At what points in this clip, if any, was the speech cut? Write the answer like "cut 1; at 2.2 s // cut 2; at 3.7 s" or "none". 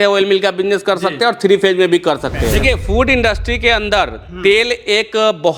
cut 1; at 2.5 s